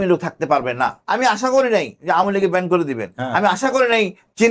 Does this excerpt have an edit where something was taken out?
yes; 1 cut; at 1.0 s

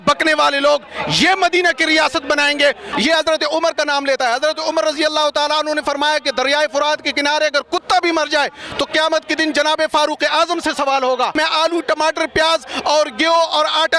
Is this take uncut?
no; 2 cuts; at 2.9 s, 11.3 s

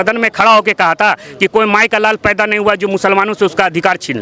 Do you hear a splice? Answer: no; 0 cuts

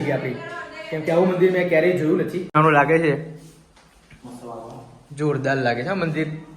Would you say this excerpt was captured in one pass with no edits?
no; 1 cut; at 2.6 s

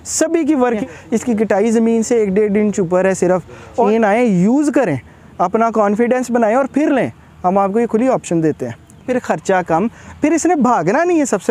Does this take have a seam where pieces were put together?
yes; 3 cuts; at 0.8 s, 3.8 s, 9.1 s

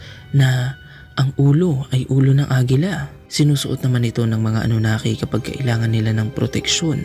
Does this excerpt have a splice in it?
yes; 1 cut; at 3.2 s

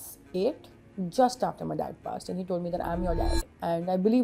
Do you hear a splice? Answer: no; 0 cuts

